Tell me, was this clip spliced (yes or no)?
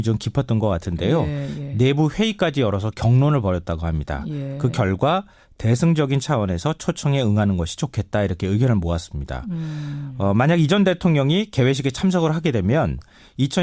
yes